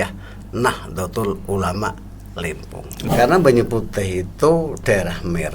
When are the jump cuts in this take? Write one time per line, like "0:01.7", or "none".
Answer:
0:02.9